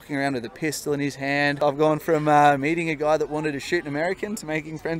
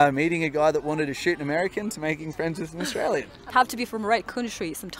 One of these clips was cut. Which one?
first; 1 cut; at 1.5 s

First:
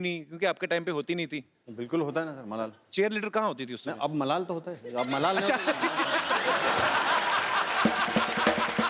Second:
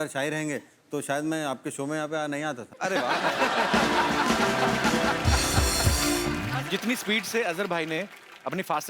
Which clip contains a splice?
second; 1 cut; at 6.5 s

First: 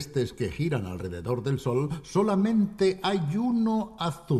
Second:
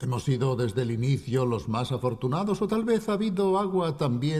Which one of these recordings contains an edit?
first; 1 cut; at 2.7 s

